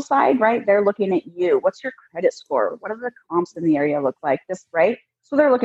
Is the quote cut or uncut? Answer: uncut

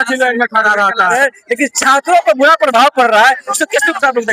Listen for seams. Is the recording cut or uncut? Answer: cut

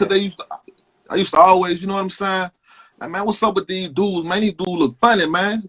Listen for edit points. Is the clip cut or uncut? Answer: uncut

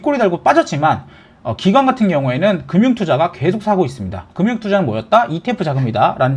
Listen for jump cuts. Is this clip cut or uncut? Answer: uncut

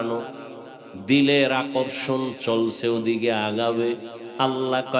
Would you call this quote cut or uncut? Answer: uncut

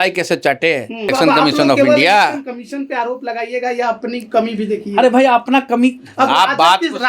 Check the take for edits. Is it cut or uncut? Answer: cut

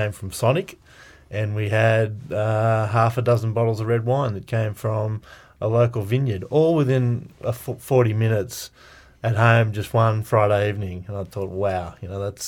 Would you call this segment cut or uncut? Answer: uncut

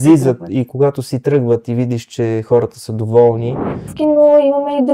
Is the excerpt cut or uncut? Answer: cut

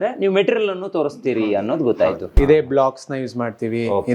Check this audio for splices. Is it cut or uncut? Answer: cut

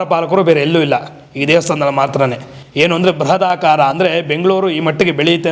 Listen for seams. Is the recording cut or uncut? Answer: uncut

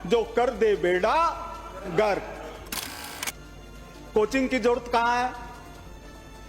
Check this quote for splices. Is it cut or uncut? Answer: cut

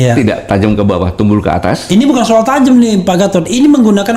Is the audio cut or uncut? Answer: uncut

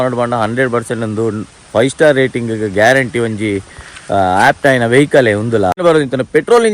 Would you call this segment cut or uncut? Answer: cut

